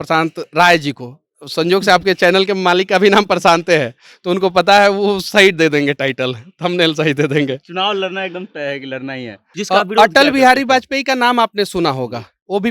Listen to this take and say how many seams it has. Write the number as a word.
one